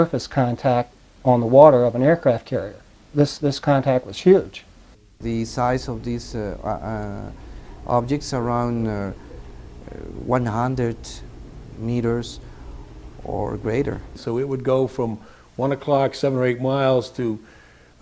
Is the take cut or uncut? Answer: cut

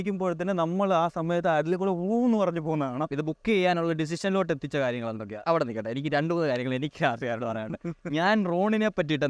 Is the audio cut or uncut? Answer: cut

